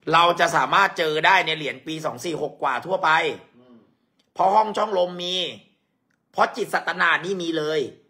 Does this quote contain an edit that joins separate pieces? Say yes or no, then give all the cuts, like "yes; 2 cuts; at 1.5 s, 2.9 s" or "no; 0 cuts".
no; 0 cuts